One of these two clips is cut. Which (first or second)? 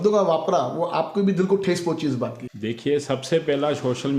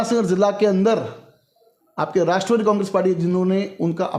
first